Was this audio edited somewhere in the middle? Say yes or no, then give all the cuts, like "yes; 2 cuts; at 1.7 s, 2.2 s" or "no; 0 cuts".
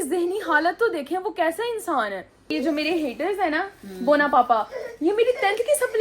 yes; 1 cut; at 2.5 s